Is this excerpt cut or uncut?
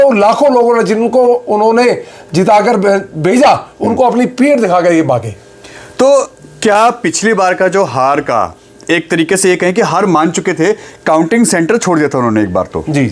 uncut